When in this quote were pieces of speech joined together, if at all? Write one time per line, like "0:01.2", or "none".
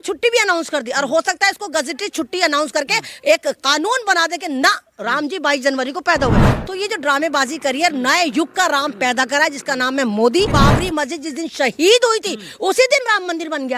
0:06.5
0:10.5